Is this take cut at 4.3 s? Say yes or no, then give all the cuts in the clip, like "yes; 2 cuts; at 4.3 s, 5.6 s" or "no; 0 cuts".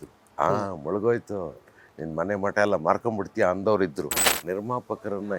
yes; 1 cut; at 4.3 s